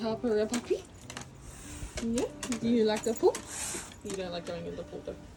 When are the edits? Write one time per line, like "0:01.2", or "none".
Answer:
none